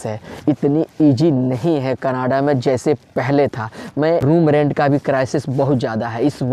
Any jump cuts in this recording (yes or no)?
yes